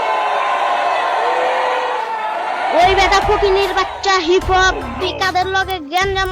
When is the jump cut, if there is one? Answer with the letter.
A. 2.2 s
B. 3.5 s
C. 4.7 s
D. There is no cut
A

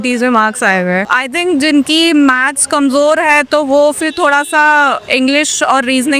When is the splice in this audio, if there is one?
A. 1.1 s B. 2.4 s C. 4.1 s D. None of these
A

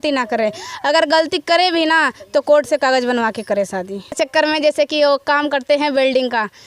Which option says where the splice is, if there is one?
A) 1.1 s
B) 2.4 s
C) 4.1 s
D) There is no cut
C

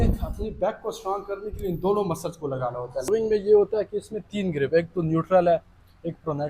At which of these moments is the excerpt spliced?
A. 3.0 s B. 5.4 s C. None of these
A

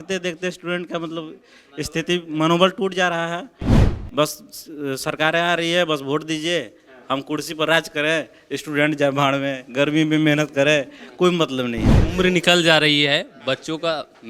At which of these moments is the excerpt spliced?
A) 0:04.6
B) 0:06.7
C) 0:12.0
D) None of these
C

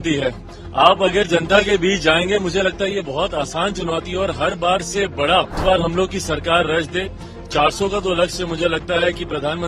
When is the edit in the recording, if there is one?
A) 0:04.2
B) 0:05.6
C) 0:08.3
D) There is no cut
B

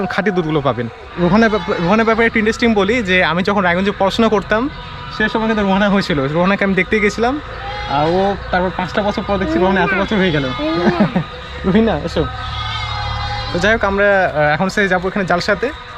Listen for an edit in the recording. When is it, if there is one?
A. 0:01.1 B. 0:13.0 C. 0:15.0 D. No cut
A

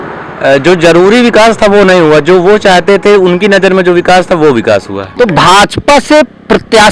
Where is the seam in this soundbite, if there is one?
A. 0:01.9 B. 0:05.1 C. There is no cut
B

